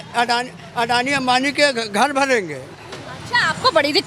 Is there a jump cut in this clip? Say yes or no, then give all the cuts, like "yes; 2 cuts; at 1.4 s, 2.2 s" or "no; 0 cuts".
no; 0 cuts